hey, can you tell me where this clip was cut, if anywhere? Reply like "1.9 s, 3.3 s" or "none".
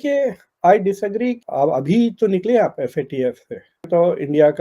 1.3 s